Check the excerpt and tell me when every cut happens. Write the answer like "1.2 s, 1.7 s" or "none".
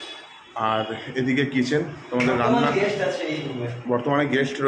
none

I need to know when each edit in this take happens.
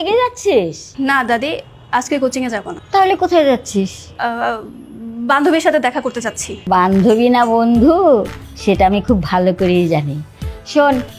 0.8 s, 2.8 s, 4.0 s, 6.5 s

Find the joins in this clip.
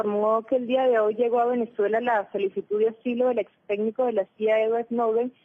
3.0 s

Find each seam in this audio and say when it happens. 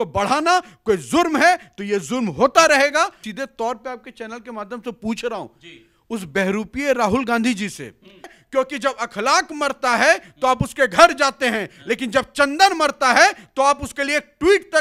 3.2 s, 8.4 s

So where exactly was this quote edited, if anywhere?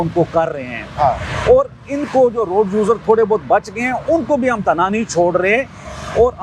none

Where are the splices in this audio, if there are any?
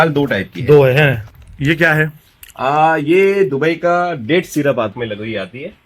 1.3 s, 4.9 s

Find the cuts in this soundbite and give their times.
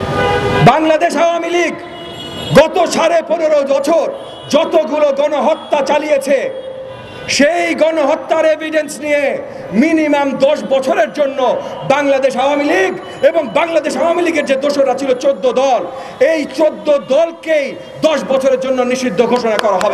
none

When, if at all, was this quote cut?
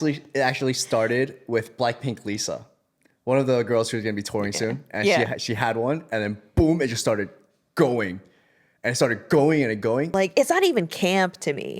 10.2 s

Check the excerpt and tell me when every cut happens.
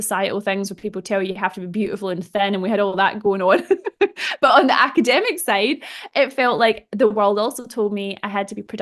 none

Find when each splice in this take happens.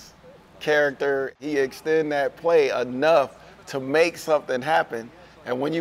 1.4 s

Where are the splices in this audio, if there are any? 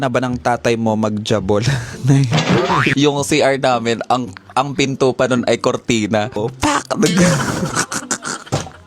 2.9 s, 6.5 s

